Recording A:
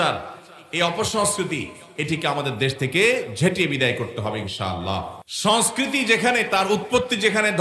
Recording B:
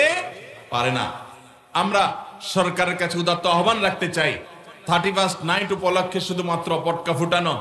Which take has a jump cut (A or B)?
A